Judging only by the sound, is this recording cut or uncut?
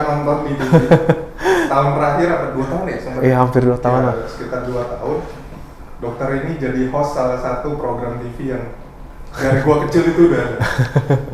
uncut